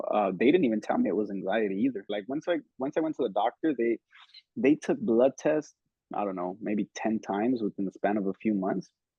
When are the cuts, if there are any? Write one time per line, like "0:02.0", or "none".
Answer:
0:02.1